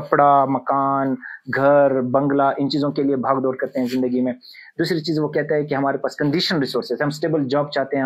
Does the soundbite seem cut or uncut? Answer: uncut